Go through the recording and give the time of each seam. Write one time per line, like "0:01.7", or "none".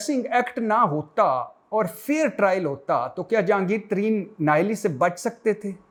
none